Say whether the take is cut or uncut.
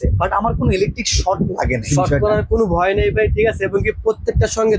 cut